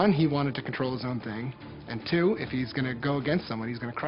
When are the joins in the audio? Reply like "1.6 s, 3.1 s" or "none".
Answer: none